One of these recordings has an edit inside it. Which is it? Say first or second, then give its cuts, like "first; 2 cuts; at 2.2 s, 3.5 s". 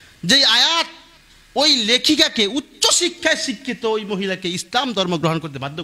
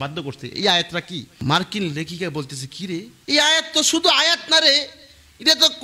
second; 2 cuts; at 1.3 s, 3.1 s